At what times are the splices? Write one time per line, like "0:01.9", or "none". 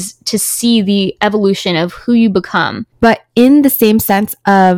0:02.9